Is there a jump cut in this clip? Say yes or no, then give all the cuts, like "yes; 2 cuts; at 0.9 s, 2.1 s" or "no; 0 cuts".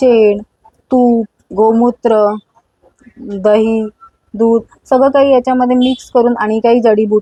no; 0 cuts